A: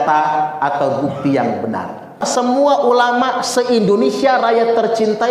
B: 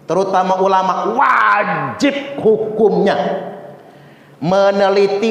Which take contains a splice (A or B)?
A